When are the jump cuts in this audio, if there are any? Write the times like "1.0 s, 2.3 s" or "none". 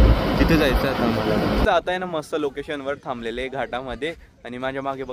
1.7 s